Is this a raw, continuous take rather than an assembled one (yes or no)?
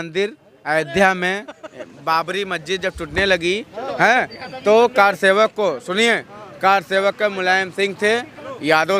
yes